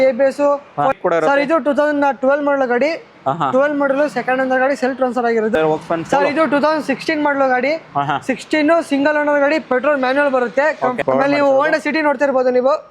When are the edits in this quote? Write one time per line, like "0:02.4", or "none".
0:01.0
0:05.6
0:11.0